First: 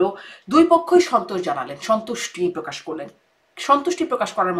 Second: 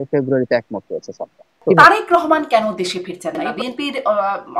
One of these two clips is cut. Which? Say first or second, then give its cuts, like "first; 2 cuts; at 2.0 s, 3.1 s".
second; 2 cuts; at 1.6 s, 3.5 s